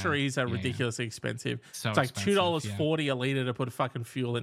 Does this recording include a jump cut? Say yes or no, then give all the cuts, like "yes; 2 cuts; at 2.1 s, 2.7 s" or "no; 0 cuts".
no; 0 cuts